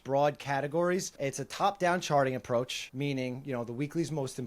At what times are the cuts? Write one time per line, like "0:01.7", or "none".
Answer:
0:01.1
0:02.8